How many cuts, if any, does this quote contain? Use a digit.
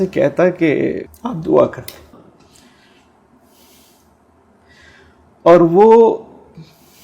2